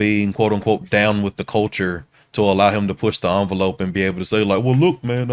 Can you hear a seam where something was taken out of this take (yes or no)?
no